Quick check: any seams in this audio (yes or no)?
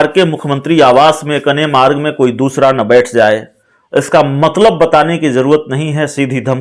no